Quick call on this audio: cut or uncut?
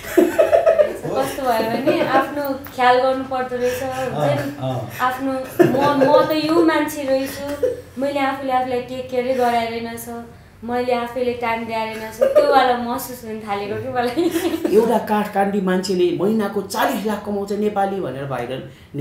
cut